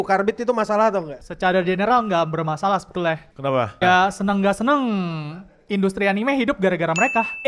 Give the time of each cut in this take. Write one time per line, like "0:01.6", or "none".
0:01.2
0:03.8